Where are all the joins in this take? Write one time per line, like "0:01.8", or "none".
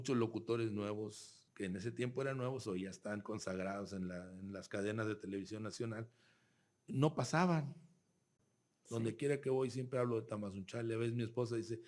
0:08.3

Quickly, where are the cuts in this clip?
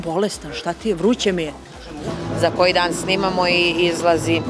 0:02.1

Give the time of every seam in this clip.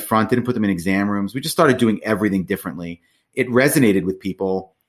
0:03.2

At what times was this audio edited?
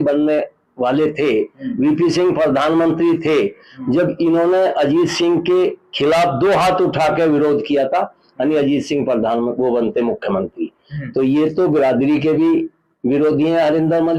none

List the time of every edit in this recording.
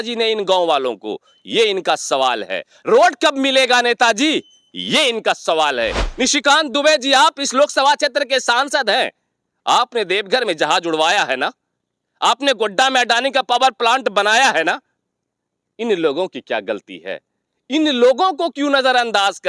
0:06.0

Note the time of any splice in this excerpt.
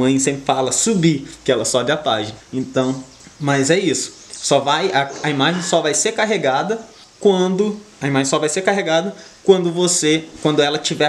none

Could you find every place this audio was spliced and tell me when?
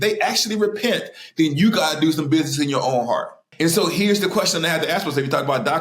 0:03.4

